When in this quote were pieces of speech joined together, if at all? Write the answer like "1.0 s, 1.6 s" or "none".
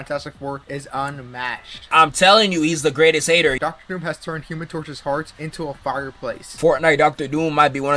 3.6 s, 6.5 s